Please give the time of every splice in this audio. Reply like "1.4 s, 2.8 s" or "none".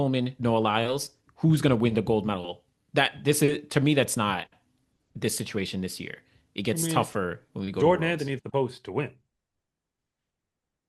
none